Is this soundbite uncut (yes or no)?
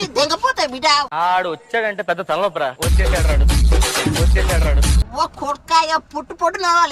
yes